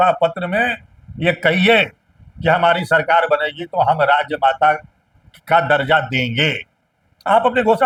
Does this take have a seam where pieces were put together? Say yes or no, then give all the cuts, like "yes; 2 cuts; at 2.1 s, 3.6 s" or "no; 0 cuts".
no; 0 cuts